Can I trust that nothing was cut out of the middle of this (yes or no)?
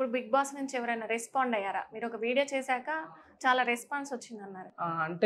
yes